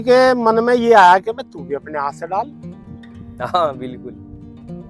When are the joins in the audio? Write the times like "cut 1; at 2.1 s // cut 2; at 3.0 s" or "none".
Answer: none